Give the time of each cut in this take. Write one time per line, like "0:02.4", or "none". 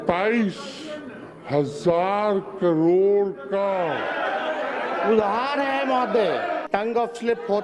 0:06.6